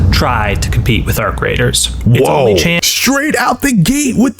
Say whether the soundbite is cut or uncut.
cut